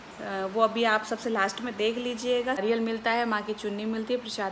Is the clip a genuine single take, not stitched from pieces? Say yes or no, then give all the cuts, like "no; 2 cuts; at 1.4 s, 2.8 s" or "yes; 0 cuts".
no; 1 cut; at 2.6 s